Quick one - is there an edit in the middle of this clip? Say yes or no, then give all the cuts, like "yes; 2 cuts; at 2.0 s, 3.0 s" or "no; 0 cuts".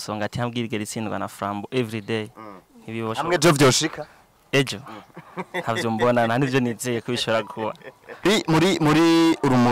yes; 1 cut; at 8.2 s